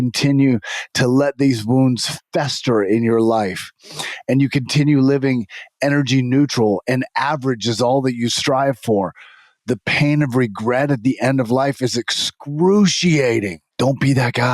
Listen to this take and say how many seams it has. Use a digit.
1